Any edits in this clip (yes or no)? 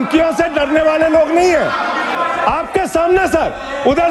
yes